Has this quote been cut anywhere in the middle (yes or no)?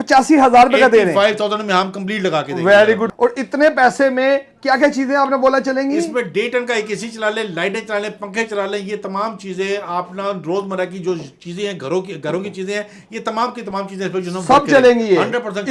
yes